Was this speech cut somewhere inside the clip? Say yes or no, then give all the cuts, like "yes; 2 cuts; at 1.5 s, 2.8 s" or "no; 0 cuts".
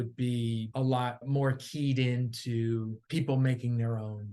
yes; 2 cuts; at 0.9 s, 3.0 s